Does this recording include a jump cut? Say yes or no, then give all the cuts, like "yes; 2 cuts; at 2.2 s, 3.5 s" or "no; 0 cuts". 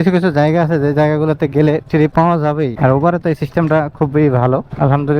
no; 0 cuts